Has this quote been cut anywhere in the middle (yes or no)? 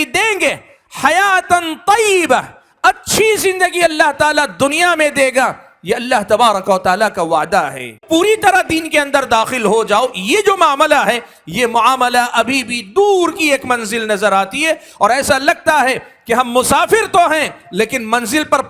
yes